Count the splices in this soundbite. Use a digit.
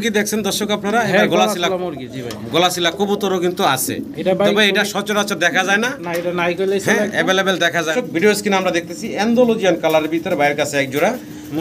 1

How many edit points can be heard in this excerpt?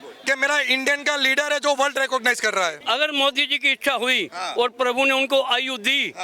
1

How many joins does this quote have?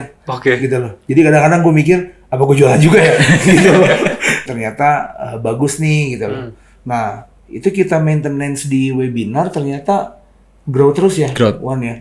1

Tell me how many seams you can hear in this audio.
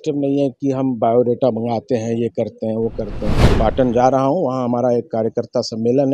1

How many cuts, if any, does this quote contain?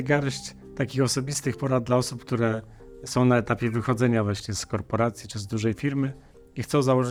0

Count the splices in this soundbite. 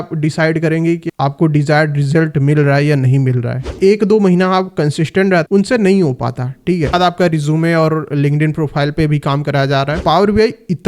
3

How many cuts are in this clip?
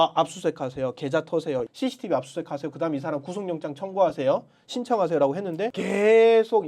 2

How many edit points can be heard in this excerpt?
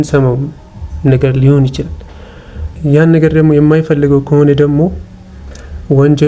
1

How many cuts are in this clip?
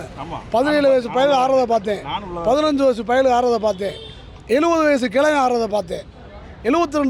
0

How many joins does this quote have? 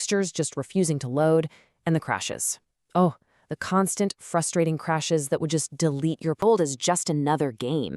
1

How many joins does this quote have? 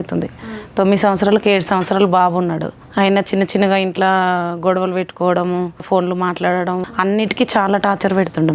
3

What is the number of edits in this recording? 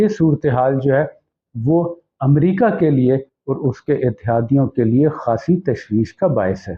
0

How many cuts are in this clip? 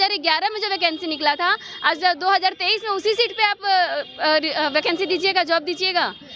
0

